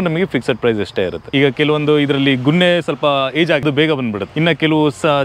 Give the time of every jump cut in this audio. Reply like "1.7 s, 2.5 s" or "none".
1.2 s, 4.2 s